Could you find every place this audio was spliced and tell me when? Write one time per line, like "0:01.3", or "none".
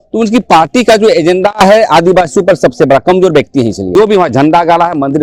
0:03.9